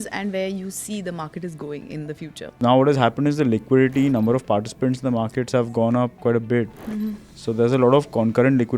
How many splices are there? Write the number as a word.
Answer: one